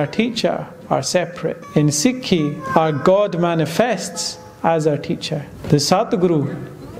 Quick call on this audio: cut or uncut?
cut